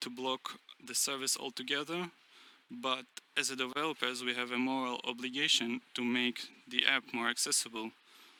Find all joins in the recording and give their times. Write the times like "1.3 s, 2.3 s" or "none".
none